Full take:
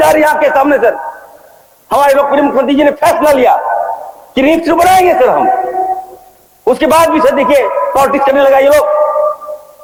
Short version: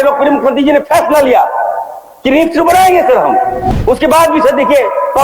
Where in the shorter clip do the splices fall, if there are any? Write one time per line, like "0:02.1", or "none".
0:03.7